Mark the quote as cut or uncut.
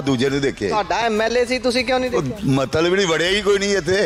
uncut